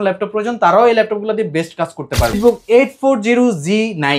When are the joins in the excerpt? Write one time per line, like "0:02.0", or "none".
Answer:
0:02.3

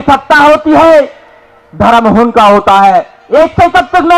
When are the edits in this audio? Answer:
0:03.2

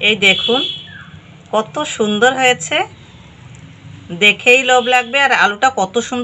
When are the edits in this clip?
none

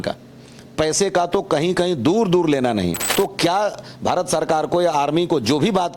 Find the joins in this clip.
0:03.0

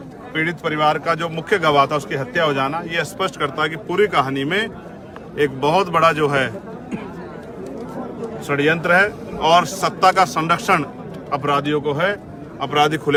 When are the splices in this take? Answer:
none

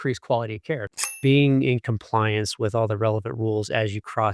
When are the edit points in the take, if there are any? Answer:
0:01.0

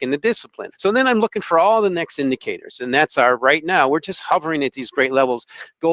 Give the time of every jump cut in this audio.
none

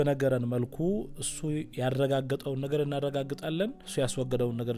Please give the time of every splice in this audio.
0:03.8

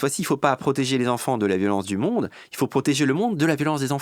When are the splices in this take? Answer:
none

